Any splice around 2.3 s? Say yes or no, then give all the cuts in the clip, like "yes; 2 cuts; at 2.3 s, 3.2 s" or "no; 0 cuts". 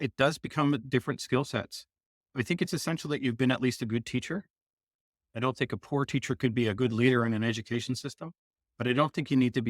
yes; 1 cut; at 2.3 s